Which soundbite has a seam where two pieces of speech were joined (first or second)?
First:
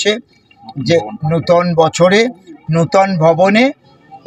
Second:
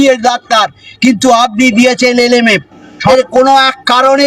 second